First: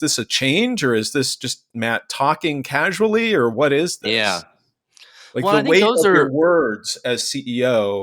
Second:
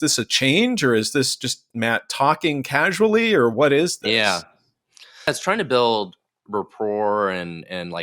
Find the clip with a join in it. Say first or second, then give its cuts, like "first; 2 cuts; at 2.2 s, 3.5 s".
second; 1 cut; at 5.3 s